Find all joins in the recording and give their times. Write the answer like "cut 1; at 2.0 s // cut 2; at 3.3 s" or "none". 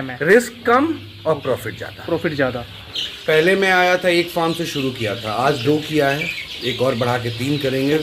cut 1; at 3.0 s

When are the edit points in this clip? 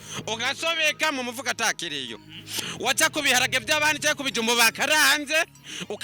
none

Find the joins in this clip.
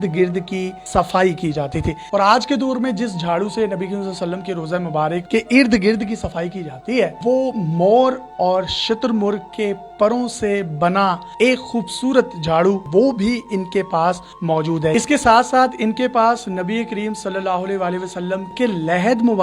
cut 1; at 2.0 s // cut 2; at 5.2 s // cut 3; at 7.2 s // cut 4; at 12.8 s // cut 5; at 14.9 s // cut 6; at 18.5 s

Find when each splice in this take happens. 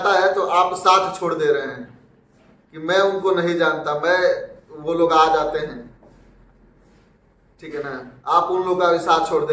none

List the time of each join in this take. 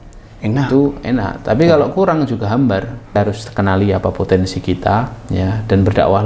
cut 1; at 3.2 s

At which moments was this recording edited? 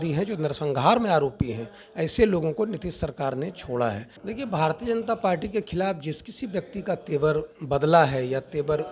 cut 1; at 4.1 s

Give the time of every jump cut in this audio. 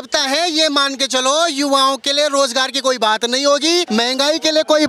cut 1; at 3.9 s

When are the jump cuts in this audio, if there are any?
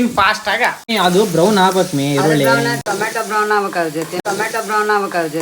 cut 1; at 0.9 s // cut 2; at 4.1 s

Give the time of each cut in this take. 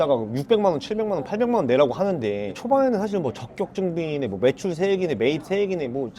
cut 1; at 2.5 s

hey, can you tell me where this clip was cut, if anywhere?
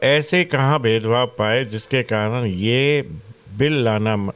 none

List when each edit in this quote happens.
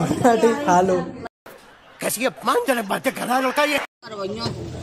cut 1; at 1.3 s // cut 2; at 3.7 s

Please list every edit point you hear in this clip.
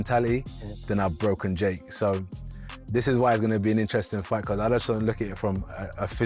none

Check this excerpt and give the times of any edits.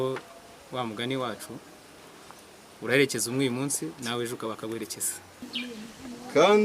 cut 1; at 5.6 s

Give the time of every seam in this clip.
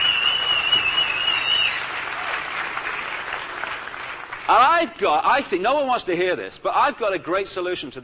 none

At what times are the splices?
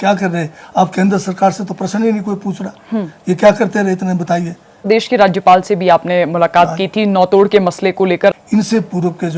cut 1; at 4.9 s // cut 2; at 8.3 s

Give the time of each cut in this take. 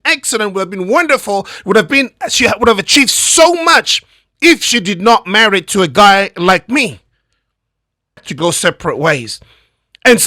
cut 1; at 8.3 s

